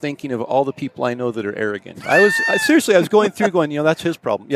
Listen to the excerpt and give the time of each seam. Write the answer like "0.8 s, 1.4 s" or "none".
none